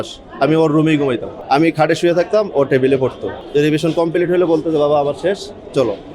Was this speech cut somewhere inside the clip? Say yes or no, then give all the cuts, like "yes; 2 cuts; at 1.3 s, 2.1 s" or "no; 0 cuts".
yes; 2 cuts; at 1.3 s, 3.4 s